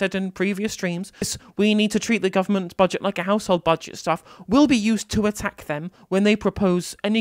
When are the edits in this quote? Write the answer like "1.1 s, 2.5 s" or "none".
1.3 s